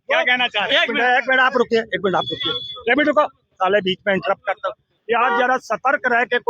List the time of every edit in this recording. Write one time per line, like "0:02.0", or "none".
0:04.9